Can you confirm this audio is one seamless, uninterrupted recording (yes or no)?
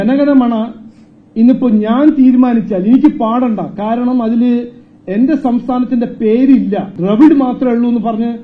no